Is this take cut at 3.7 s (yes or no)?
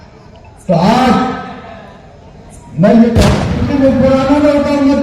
yes